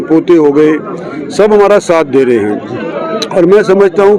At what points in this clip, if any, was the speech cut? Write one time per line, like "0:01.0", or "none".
none